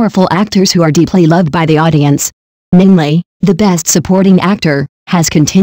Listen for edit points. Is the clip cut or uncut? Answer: cut